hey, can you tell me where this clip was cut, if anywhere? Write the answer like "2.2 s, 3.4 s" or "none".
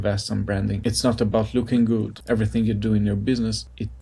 0.8 s, 2.1 s